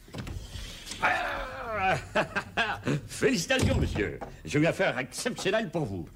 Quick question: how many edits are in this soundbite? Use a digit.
0